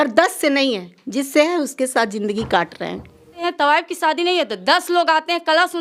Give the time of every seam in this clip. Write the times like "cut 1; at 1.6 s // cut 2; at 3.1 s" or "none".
cut 1; at 3.4 s